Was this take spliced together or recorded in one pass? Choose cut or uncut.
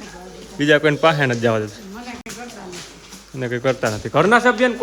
uncut